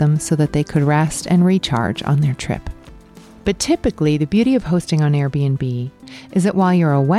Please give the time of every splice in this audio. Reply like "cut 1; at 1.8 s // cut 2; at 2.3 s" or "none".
none